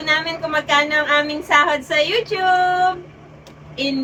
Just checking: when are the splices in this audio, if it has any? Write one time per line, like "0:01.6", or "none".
none